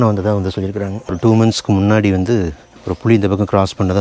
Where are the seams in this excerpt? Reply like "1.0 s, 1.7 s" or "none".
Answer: 1.1 s